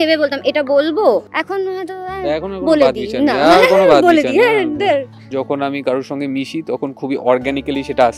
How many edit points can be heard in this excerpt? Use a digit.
2